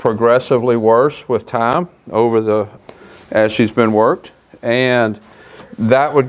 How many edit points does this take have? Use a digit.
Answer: 1